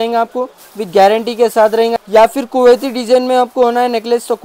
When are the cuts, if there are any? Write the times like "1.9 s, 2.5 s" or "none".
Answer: 1.9 s